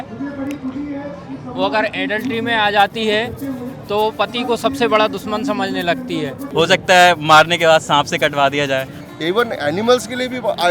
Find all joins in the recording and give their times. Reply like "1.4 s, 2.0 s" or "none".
6.4 s, 9.0 s